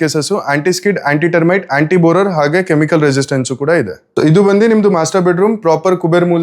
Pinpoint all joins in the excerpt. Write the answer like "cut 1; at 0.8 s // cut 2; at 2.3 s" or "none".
cut 1; at 4.0 s